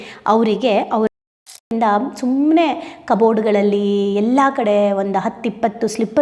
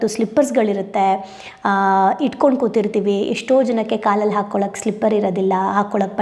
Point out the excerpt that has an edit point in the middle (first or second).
first